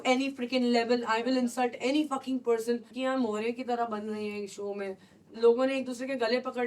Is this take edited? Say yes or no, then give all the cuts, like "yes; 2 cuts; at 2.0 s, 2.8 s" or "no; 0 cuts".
yes; 2 cuts; at 2.9 s, 5.2 s